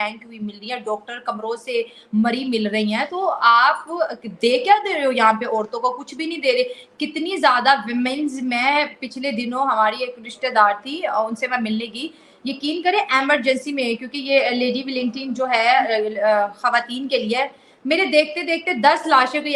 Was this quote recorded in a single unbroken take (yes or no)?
yes